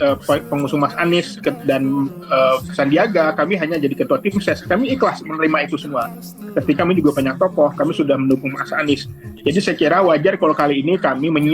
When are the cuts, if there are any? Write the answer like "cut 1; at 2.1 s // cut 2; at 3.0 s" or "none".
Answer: cut 1; at 2.6 s // cut 2; at 6.8 s